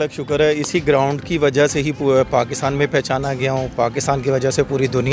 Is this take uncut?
yes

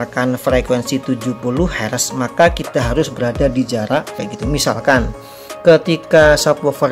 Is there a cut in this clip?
yes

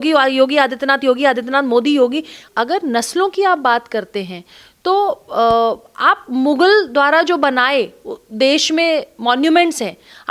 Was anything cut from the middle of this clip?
yes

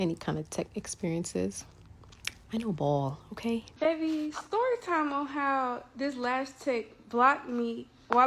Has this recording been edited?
yes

